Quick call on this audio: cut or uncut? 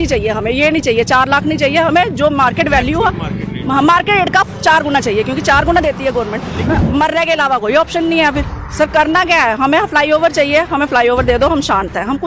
cut